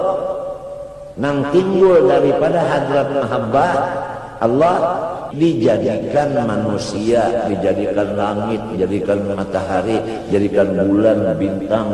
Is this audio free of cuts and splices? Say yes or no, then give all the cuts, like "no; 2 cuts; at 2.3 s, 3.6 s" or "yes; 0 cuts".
no; 1 cut; at 5.2 s